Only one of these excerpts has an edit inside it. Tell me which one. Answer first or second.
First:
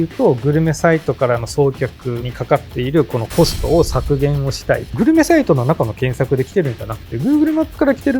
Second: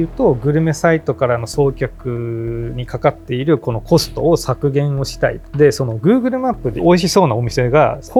first